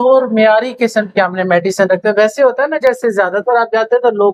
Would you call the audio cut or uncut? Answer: uncut